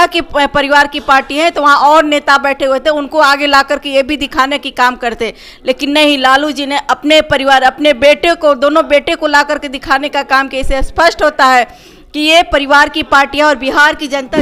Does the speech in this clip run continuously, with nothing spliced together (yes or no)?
yes